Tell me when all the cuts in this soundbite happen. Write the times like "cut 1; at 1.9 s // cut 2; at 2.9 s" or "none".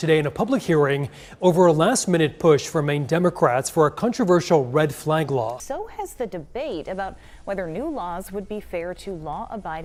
none